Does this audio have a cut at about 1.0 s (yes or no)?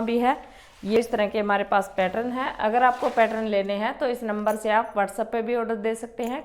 yes